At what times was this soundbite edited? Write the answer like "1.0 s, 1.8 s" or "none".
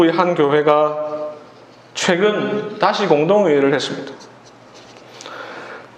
none